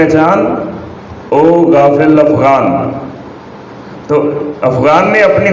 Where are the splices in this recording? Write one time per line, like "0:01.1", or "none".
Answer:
none